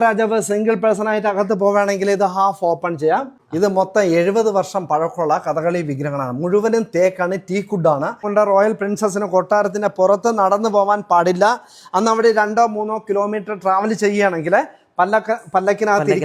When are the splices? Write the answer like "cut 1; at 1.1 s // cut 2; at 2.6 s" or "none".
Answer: cut 1; at 3.4 s // cut 2; at 8.2 s